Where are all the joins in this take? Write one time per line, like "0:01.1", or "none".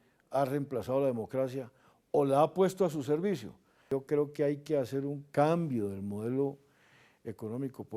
0:03.8